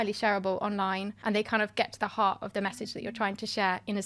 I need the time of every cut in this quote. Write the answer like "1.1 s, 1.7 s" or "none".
1.1 s